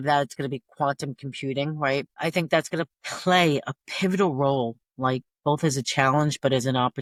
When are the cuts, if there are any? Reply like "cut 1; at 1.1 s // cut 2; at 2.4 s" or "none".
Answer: none